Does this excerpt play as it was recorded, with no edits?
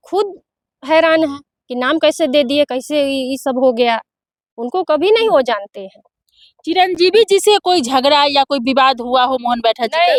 yes; 0 cuts

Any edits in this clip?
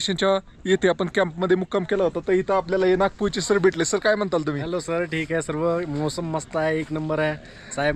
no; 0 cuts

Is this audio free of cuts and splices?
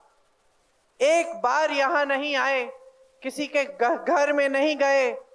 yes; 0 cuts

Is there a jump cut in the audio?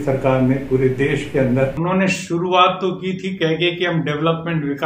yes; 1 cut; at 1.8 s

